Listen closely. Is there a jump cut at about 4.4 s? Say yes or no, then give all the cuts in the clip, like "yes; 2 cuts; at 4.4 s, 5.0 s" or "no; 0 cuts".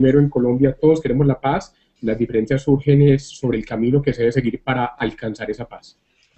no; 0 cuts